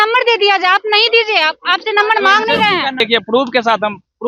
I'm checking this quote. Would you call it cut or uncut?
cut